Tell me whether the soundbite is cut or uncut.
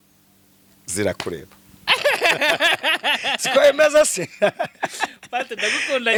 uncut